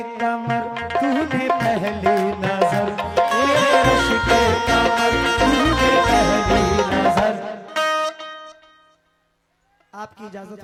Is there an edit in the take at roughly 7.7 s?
no; 0 cuts

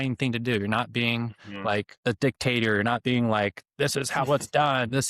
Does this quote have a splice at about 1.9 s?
yes; 1 cut; at 1.9 s

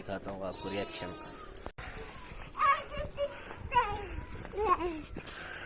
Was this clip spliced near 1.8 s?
yes; 1 cut; at 1.8 s

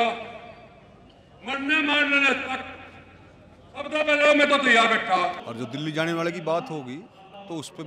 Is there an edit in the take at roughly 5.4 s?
yes; 1 cut; at 5.4 s

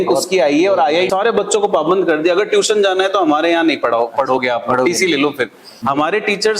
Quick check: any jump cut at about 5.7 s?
yes; 2 cuts; at 1.1 s, 5.7 s

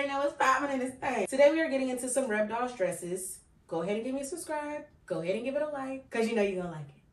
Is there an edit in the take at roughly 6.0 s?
yes; 3 cuts; at 1.3 s, 4.9 s, 6.0 s

